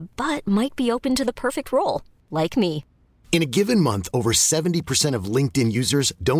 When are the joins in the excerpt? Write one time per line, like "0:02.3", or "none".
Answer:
none